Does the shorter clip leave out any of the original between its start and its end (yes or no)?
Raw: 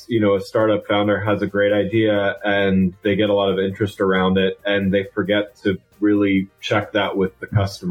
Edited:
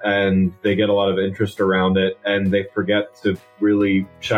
no